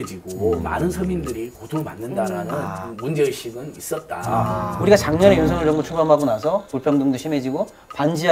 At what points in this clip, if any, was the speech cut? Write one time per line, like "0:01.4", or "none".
0:04.7